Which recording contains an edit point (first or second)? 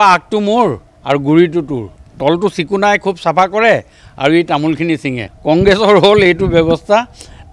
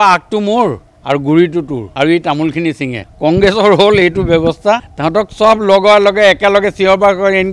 second